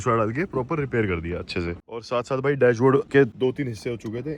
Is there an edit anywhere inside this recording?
yes; 2 cuts; at 2.1 s, 3.1 s

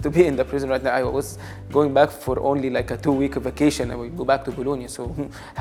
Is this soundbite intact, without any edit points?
yes; 0 cuts

